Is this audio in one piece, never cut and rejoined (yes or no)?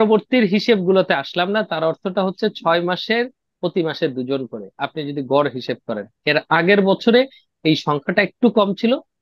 yes